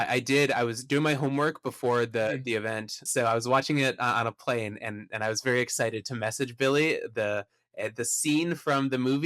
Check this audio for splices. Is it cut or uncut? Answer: cut